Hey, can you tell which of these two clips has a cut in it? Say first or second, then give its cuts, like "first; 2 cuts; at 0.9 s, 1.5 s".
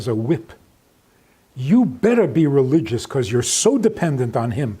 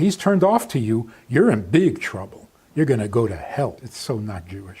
second; 1 cut; at 3.9 s